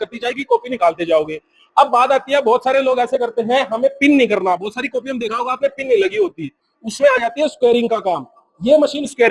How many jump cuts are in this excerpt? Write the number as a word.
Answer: zero